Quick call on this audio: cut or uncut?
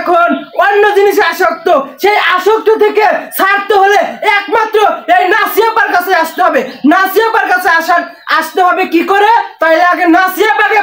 uncut